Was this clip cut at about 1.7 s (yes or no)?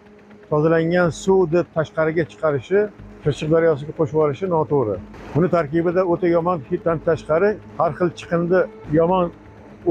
no